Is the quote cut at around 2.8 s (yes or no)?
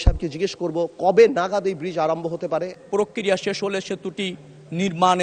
yes